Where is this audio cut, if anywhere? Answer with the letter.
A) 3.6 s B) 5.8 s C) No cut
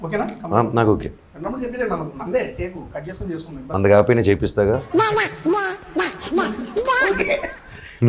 A